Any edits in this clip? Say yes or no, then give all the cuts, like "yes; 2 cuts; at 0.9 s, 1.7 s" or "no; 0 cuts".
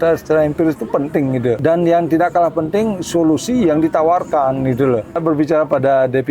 yes; 2 cuts; at 1.6 s, 5.2 s